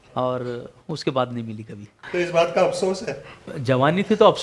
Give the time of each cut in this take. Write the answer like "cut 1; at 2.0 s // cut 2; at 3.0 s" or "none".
cut 1; at 1.9 s // cut 2; at 3.5 s